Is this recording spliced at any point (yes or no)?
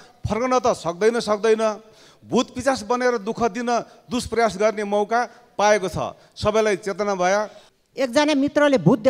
yes